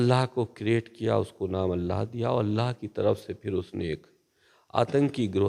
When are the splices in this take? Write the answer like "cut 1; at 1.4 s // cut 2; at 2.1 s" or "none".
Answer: none